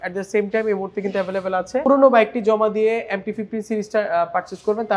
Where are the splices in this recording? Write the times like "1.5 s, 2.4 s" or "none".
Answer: 1.9 s